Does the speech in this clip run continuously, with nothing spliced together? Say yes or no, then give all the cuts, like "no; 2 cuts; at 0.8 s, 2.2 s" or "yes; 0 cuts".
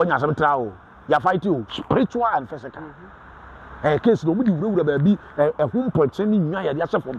yes; 0 cuts